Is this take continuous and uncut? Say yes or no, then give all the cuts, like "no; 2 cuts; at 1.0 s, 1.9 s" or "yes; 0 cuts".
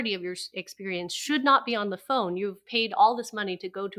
yes; 0 cuts